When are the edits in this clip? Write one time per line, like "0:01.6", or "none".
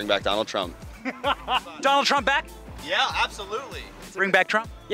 none